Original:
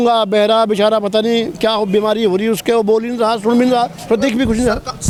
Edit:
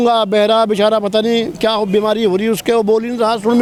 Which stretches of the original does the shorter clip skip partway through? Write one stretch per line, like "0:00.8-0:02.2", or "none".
none